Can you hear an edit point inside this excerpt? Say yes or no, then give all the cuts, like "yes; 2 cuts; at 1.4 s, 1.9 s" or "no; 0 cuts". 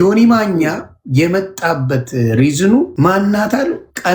yes; 1 cut; at 2.9 s